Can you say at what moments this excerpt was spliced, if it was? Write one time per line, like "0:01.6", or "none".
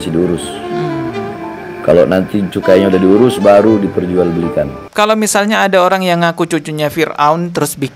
0:04.8